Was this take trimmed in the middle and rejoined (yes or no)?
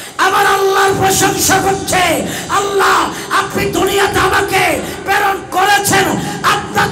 no